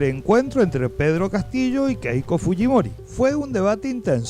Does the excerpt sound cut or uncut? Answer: uncut